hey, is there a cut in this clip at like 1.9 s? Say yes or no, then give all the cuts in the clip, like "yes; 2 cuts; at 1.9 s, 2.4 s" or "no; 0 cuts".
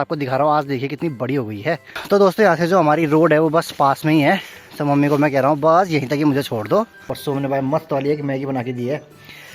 yes; 2 cuts; at 1.9 s, 7.1 s